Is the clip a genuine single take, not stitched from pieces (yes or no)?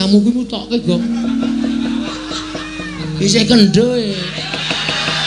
yes